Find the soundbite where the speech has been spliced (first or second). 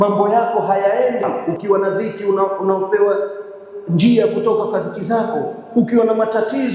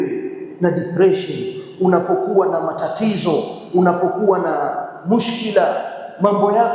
first